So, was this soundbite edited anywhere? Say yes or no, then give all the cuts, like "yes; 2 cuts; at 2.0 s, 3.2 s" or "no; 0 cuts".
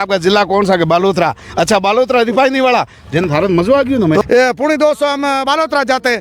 yes; 1 cut; at 4.2 s